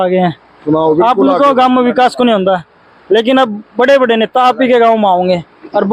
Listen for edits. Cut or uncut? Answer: uncut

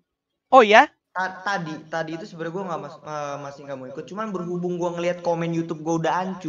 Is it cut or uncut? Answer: uncut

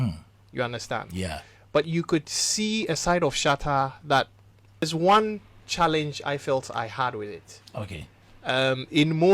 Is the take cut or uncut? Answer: cut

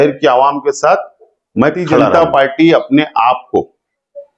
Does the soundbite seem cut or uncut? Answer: cut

